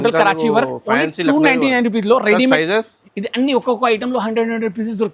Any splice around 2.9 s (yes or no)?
yes